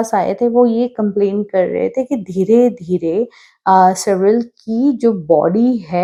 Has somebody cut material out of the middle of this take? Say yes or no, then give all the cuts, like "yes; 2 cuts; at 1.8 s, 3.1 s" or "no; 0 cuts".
no; 0 cuts